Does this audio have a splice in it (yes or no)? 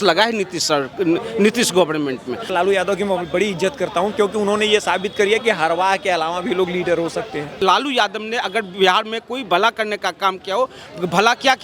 yes